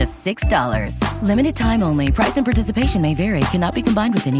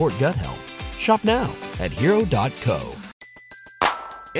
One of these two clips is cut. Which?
second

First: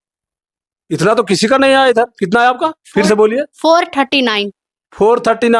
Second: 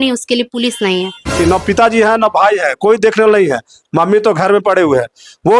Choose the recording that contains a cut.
second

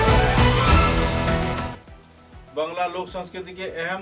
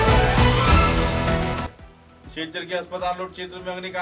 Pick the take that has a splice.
second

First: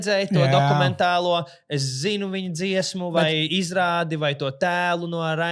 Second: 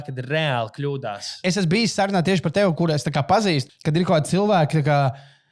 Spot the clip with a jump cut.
second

